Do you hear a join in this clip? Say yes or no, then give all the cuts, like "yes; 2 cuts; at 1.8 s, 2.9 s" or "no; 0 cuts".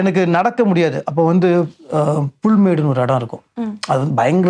no; 0 cuts